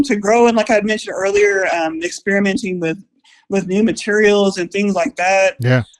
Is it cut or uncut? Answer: uncut